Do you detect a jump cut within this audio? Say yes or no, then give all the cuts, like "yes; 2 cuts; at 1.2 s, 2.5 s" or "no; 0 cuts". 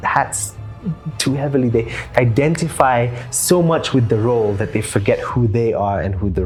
no; 0 cuts